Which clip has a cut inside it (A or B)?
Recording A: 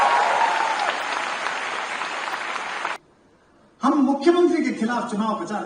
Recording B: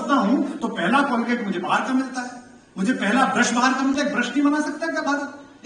A